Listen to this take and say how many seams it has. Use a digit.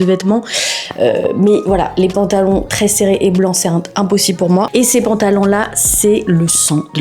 1